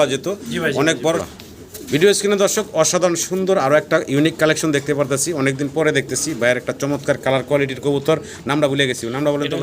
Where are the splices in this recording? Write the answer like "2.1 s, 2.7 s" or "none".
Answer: 1.2 s